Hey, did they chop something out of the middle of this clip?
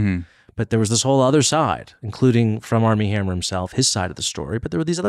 no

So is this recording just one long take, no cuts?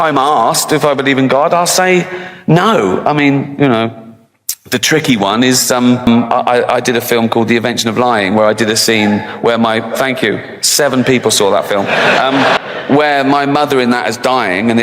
no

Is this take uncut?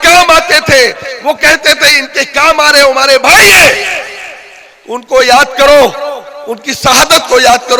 yes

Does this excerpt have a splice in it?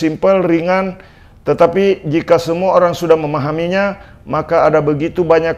no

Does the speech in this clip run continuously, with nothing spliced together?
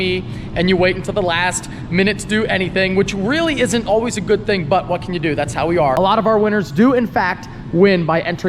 no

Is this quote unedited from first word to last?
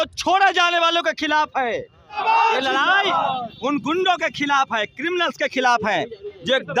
no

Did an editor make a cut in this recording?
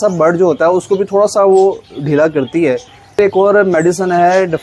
yes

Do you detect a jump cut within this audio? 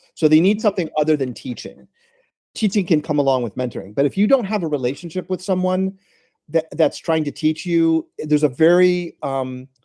yes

